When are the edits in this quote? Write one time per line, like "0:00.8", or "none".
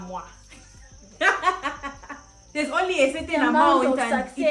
0:02.5